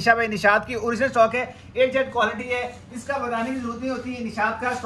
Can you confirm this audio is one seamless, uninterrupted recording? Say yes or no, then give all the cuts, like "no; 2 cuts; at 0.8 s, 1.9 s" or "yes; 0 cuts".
yes; 0 cuts